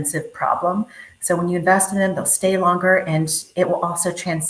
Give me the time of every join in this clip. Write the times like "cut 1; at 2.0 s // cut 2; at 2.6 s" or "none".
none